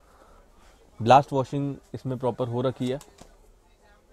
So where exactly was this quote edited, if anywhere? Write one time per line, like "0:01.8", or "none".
none